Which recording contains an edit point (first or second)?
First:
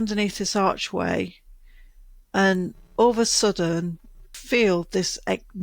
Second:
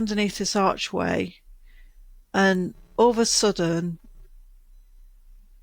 first